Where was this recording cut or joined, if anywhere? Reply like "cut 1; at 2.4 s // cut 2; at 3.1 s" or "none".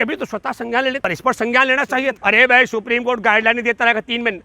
cut 1; at 1.0 s // cut 2; at 2.2 s